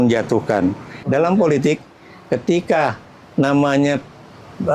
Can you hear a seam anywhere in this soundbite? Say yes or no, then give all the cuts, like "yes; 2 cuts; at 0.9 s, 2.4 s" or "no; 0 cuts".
yes; 1 cut; at 0.9 s